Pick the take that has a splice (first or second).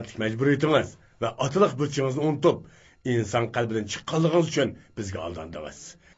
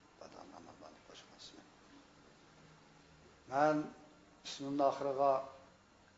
first